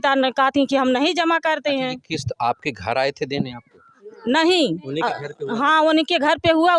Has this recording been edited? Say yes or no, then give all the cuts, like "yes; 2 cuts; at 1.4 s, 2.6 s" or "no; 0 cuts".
no; 0 cuts